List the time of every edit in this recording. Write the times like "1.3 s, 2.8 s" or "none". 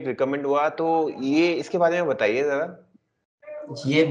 none

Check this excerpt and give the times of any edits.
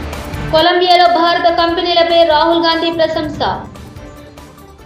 none

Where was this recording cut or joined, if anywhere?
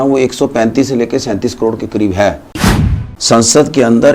3.0 s

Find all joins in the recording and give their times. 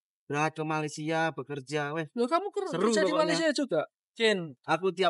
4.2 s

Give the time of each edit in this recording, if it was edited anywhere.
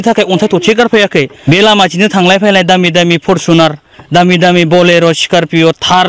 1.4 s

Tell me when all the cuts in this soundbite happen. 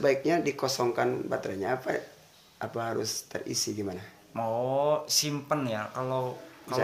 none

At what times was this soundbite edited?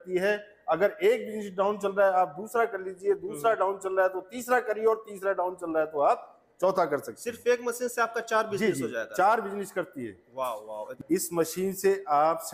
11.0 s

